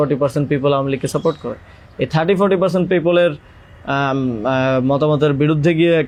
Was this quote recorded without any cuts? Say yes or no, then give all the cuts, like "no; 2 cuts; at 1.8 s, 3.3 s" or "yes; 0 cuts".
yes; 0 cuts